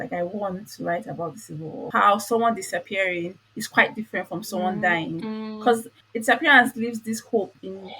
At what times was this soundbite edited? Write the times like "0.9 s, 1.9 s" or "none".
1.9 s, 6.0 s

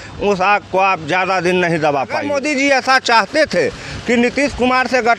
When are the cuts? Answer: 2.3 s

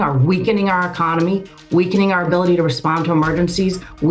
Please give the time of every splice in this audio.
none

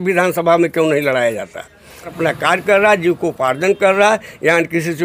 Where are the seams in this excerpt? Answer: 2.1 s

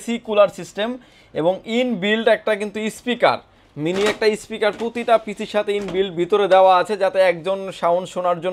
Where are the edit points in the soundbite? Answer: none

